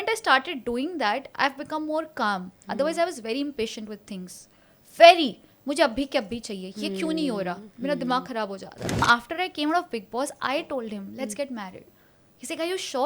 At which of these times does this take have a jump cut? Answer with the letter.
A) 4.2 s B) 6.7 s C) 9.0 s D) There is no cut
C